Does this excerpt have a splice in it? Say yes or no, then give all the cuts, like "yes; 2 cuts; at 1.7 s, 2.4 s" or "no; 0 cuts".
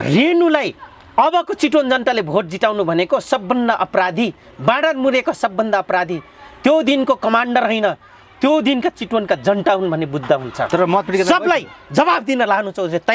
no; 0 cuts